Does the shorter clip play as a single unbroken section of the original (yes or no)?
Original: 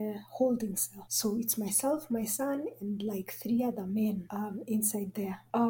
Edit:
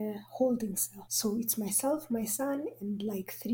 yes